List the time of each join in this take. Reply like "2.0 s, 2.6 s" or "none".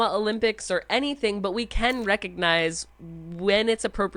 1.2 s